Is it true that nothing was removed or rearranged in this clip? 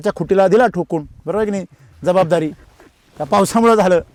yes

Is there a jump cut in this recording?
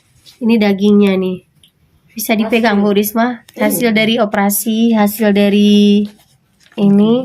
no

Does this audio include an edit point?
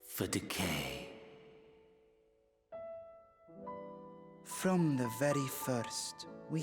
yes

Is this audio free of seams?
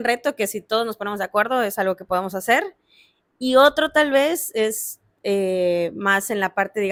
yes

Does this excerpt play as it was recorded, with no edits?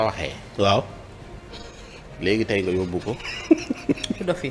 yes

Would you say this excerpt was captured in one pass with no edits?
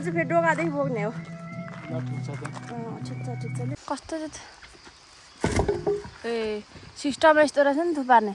no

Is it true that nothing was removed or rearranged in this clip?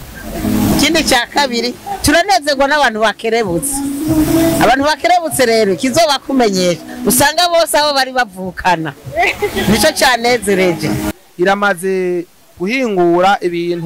no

